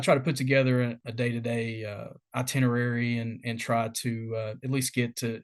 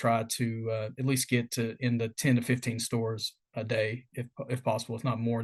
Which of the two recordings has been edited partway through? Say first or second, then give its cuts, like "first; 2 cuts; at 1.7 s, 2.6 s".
first; 1 cut; at 1.0 s